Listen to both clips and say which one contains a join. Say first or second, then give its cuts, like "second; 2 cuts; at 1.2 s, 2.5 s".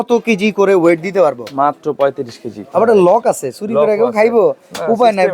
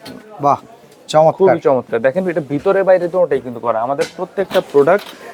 first; 1 cut; at 2.6 s